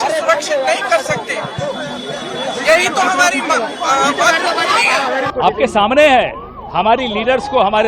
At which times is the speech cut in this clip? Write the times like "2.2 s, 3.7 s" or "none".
5.3 s